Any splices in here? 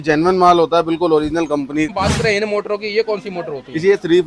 yes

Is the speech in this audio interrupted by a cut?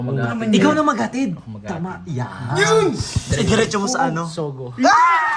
no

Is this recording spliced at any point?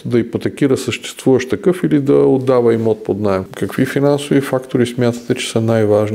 yes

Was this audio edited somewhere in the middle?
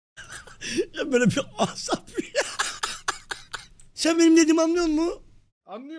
yes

